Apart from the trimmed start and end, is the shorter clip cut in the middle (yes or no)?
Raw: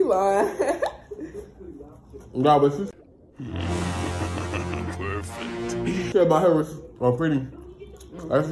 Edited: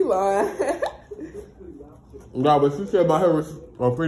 yes